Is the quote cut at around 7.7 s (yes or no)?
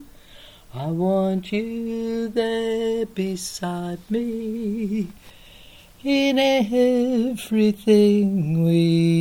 no